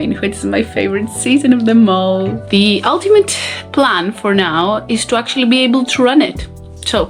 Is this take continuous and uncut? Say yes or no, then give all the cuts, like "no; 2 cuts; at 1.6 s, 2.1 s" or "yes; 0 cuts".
no; 1 cut; at 2.4 s